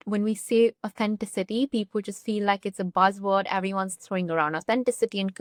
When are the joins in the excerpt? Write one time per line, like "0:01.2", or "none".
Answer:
none

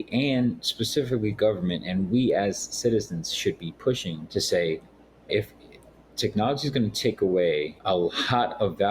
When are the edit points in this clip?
0:04.2
0:07.8

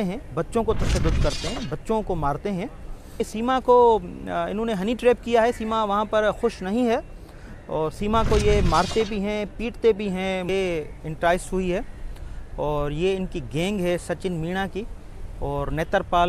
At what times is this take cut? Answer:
0:03.3
0:10.5

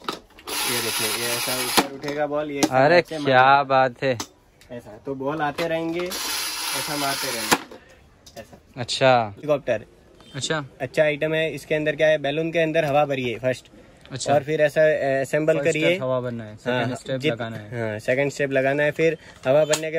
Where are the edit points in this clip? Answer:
0:09.4

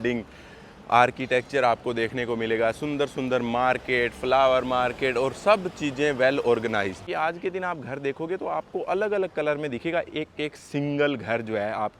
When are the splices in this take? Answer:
0:07.0

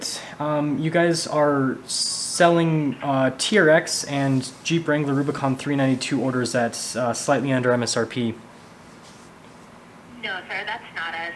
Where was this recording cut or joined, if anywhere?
none

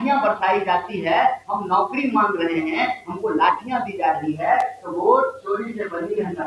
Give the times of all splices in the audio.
none

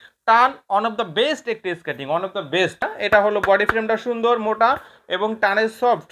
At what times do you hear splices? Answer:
0:02.9

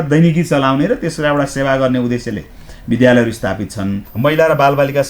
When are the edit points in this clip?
0:04.0

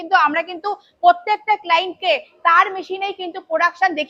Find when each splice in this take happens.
none

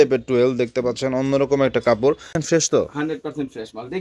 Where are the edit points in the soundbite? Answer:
0:02.3

